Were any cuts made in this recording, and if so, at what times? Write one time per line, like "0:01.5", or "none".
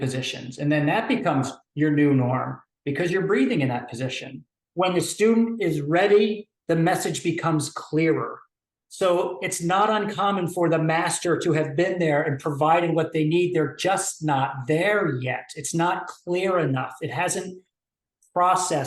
0:04.6